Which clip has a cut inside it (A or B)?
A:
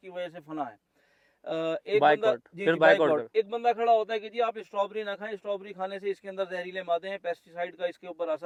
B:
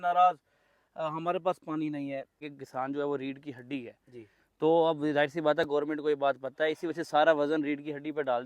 B